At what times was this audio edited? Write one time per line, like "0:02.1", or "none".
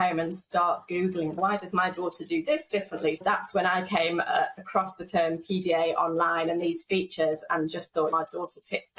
0:01.4
0:03.2